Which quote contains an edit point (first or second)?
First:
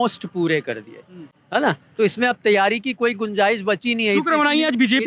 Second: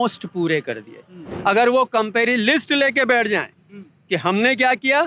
second